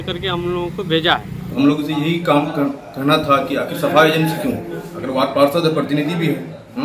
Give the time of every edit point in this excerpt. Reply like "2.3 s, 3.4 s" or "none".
1.4 s